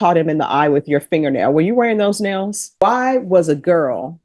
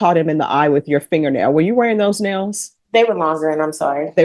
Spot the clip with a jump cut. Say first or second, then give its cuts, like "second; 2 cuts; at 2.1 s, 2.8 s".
first; 1 cut; at 2.7 s